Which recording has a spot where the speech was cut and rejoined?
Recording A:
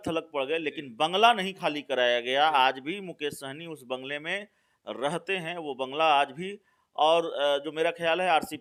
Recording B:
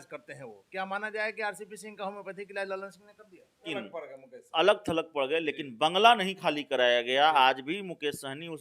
B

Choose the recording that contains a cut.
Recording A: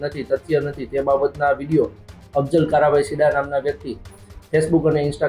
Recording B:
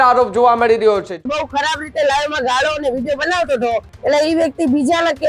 B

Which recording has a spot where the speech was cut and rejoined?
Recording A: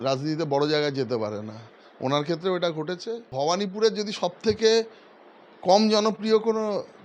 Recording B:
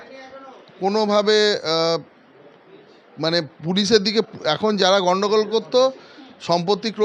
A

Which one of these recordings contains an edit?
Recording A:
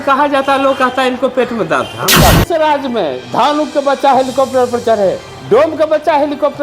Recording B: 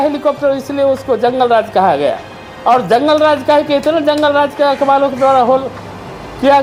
A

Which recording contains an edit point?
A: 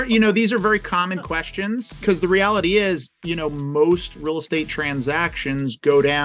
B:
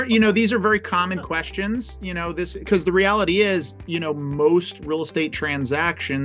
A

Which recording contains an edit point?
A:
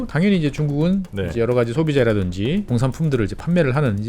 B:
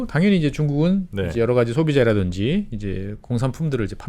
A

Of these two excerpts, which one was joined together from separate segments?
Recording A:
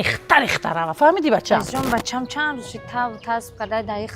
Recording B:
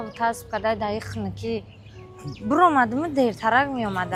A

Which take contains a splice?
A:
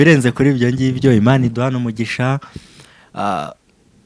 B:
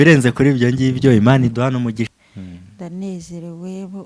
B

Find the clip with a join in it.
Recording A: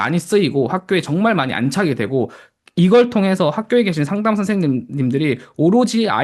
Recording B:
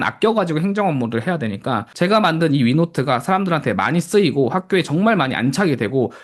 B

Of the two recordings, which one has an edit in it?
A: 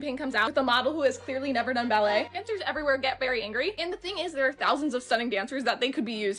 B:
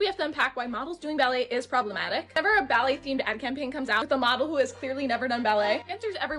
A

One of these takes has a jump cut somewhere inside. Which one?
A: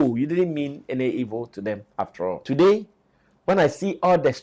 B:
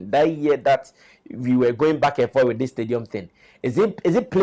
A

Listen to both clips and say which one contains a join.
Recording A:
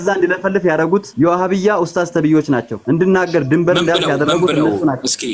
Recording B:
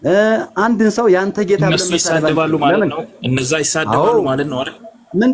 A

